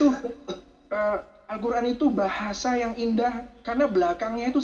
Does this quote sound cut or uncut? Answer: uncut